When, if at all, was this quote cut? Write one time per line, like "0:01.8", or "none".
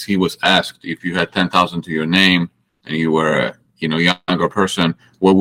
none